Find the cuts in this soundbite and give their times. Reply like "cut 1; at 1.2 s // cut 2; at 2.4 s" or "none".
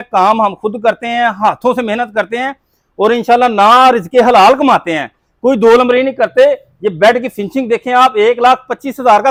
none